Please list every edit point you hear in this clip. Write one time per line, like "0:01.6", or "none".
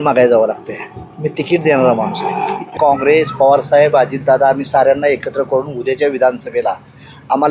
0:02.7